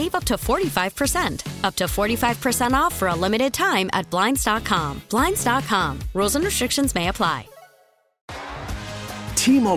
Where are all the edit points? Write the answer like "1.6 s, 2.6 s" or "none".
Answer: 8.3 s